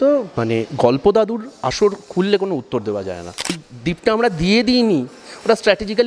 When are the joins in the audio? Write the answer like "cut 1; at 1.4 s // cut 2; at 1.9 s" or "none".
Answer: cut 1; at 3.7 s